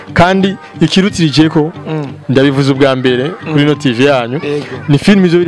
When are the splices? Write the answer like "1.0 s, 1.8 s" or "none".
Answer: none